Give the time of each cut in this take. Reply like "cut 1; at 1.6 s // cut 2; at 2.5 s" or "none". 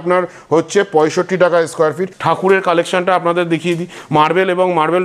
cut 1; at 2.1 s